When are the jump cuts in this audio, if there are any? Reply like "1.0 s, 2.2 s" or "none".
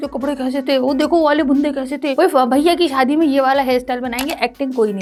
none